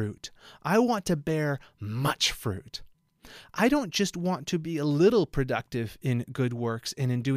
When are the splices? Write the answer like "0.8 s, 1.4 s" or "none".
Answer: none